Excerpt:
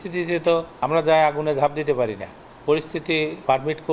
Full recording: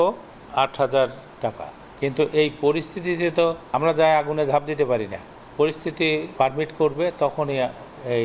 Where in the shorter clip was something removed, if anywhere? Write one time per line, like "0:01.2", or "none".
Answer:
none